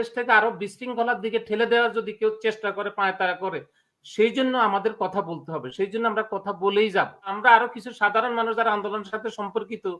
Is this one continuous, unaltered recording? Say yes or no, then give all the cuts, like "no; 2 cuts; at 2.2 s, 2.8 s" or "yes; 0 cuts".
no; 1 cut; at 7.3 s